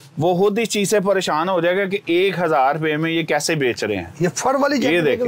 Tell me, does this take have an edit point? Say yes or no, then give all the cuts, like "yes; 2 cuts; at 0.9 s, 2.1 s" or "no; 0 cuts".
no; 0 cuts